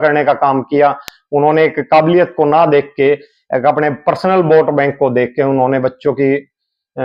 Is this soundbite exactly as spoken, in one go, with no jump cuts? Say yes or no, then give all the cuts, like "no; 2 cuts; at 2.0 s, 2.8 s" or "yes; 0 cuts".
yes; 0 cuts